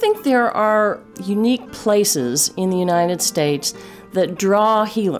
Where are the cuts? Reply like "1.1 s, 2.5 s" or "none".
1.0 s